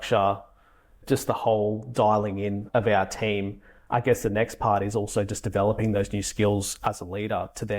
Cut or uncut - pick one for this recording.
cut